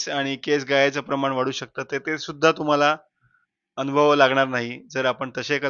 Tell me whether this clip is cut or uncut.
uncut